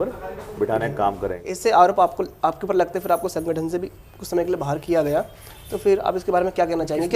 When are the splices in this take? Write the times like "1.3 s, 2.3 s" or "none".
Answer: 1.5 s